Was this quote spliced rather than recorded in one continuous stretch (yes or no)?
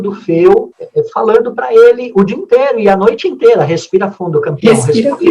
no